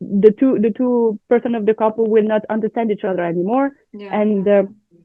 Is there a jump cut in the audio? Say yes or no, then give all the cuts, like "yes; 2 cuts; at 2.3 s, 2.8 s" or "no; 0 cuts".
no; 0 cuts